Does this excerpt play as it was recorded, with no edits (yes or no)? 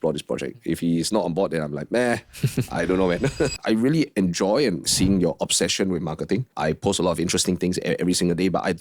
no